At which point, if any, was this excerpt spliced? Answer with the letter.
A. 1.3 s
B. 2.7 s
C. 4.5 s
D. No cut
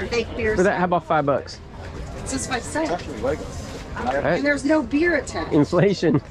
D